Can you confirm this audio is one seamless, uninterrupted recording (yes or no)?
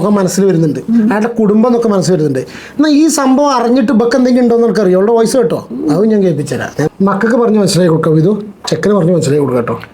no